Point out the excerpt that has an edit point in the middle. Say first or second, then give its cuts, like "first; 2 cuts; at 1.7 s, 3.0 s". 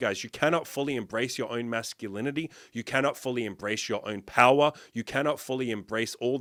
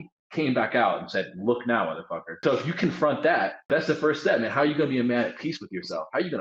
second; 2 cuts; at 2.4 s, 3.7 s